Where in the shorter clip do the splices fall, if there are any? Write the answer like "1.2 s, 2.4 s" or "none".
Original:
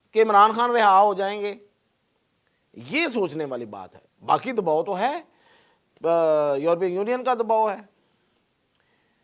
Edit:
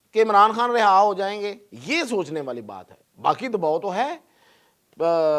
1.7 s